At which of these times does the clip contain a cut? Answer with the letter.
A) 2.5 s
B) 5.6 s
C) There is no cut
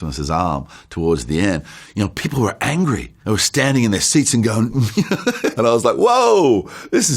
B